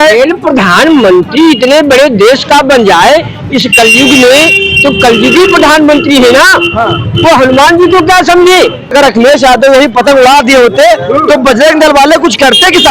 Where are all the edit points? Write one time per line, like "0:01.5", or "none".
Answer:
0:09.1